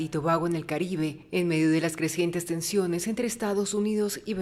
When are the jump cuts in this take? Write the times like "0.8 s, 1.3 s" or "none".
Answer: none